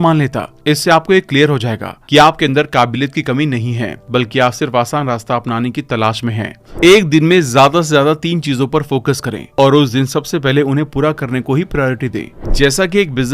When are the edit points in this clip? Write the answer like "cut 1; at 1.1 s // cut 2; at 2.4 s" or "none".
cut 1; at 6.6 s // cut 2; at 12.3 s